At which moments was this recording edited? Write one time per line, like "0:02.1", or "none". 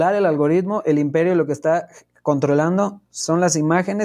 none

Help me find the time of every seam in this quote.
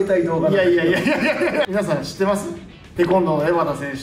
0:01.7

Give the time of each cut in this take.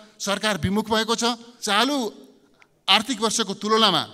0:01.5

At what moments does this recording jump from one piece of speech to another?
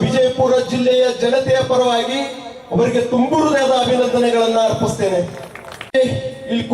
none

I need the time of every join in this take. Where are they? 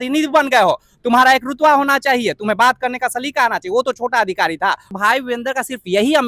0:04.9

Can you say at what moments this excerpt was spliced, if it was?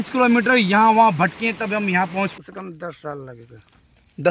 0:02.3

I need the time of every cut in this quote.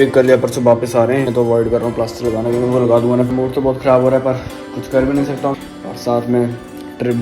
0:01.3
0:03.3
0:05.6

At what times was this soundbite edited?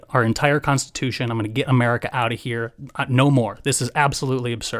none

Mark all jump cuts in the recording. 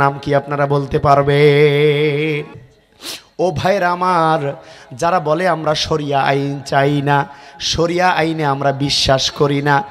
0:02.5

